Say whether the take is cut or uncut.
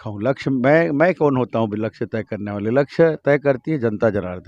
uncut